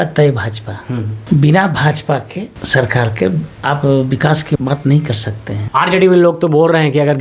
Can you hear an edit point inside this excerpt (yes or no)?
yes